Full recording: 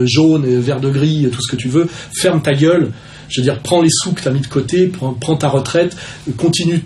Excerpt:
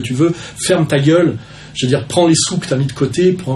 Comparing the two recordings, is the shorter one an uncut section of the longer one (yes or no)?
yes